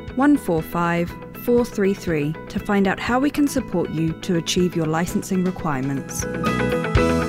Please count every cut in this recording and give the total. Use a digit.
1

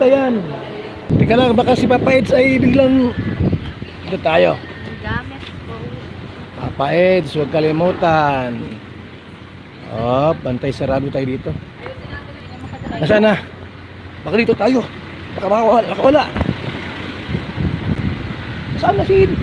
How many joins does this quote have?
2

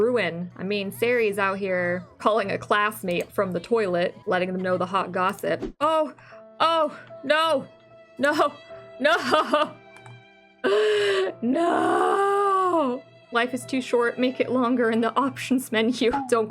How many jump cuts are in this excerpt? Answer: 2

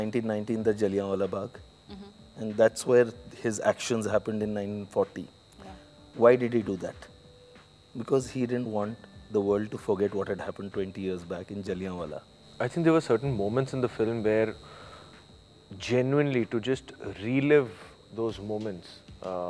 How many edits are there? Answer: 1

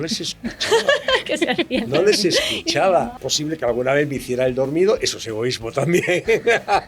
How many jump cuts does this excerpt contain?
1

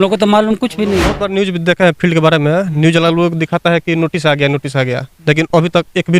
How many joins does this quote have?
1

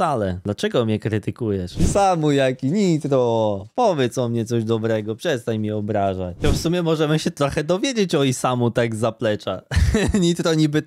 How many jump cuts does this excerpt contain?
2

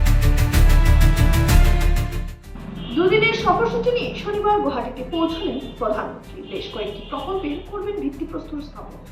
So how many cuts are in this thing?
0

